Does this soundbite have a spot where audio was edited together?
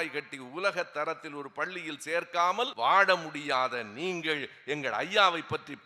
yes; 1 cut; at 2.7 s

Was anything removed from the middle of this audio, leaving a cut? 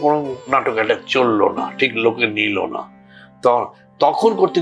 no; 0 cuts

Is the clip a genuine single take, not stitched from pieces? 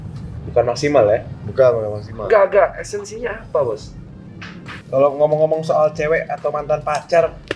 no; 1 cut; at 4.7 s

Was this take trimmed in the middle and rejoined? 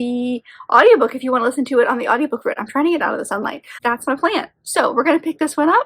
yes; 1 cut; at 3.7 s

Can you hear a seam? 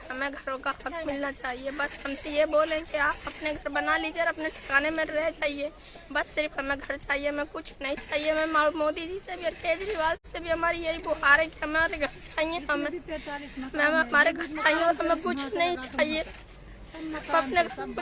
no; 0 cuts

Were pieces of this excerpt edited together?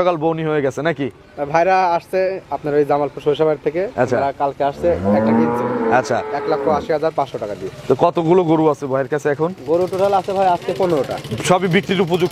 no; 0 cuts

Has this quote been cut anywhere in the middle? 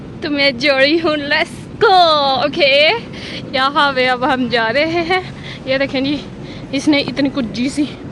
no; 0 cuts

